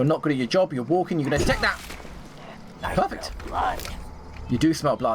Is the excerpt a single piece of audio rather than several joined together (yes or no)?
yes